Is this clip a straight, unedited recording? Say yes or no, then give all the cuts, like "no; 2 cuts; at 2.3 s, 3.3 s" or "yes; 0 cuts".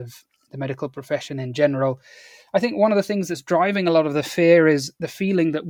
yes; 0 cuts